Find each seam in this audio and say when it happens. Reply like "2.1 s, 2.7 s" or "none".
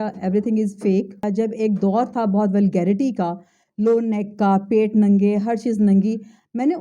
1.3 s

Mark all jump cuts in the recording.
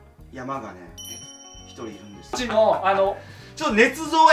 2.4 s

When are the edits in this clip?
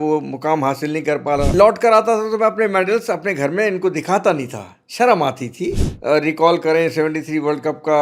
1.5 s, 5.9 s

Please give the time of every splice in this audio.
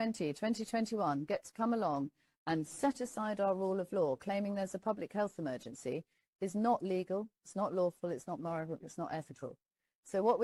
none

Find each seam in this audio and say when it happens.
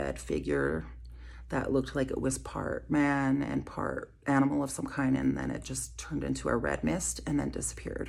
none

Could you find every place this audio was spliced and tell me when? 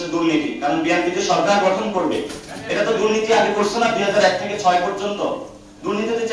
none

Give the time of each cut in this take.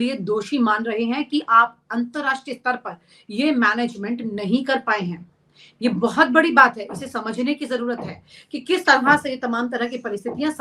none

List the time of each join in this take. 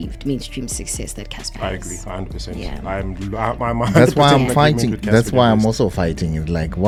none

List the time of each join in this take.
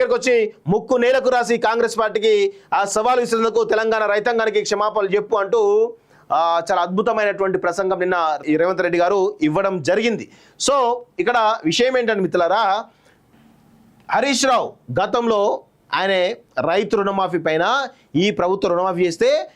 8.4 s

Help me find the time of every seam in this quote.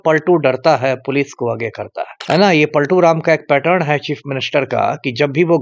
2.1 s

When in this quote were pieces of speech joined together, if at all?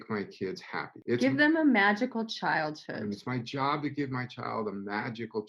none

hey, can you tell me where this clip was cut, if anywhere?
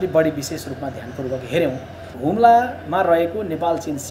2.1 s

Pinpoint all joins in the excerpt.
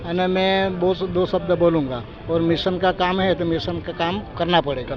none

